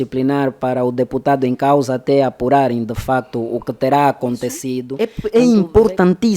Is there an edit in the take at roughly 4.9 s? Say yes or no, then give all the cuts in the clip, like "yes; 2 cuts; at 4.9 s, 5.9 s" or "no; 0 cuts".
yes; 1 cut; at 4.9 s